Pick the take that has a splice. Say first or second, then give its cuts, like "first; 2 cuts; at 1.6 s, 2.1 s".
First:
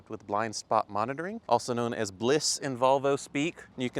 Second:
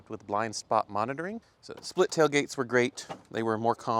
second; 1 cut; at 1.4 s